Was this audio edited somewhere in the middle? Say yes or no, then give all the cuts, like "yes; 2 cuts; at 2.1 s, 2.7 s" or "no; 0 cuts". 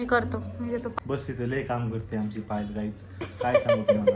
yes; 1 cut; at 1.0 s